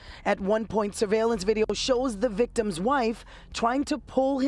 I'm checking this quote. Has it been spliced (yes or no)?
no